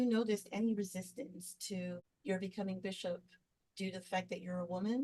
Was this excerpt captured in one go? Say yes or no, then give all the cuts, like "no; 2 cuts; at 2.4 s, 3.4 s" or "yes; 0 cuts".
no; 1 cut; at 2.1 s